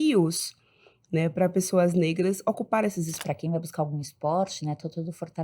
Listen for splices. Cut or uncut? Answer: cut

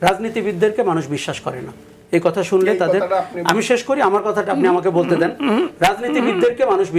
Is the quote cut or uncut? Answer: uncut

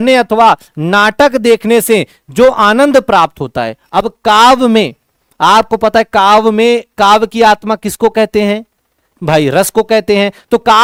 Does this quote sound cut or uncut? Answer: uncut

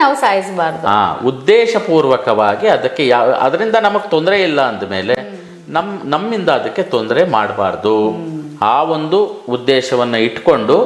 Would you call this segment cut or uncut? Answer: uncut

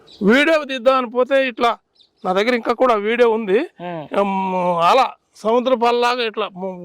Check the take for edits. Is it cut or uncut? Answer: uncut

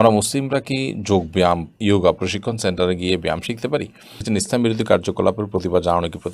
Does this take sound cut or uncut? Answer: cut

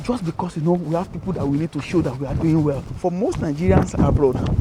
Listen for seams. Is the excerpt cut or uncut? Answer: cut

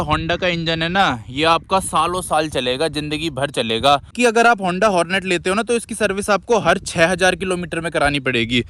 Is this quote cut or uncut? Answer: cut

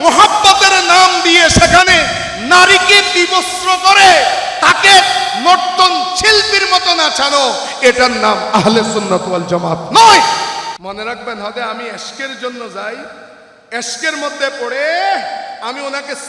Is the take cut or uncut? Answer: cut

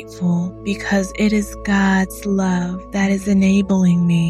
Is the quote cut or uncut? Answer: uncut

